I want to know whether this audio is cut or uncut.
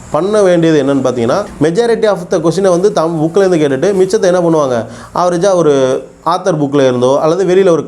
cut